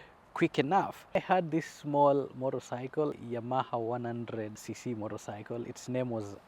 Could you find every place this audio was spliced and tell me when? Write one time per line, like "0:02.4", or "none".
0:01.2
0:03.2
0:04.6